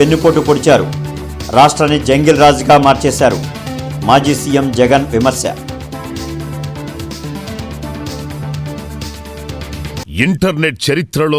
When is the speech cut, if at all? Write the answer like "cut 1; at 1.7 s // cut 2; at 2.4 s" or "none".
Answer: cut 1; at 10.0 s